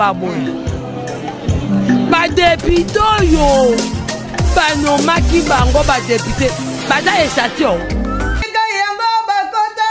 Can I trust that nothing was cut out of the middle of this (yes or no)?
yes